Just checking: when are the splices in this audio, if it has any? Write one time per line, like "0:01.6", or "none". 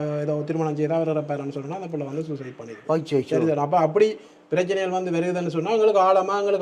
none